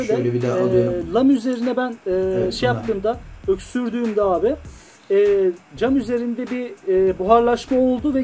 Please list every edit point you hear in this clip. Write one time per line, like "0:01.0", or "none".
none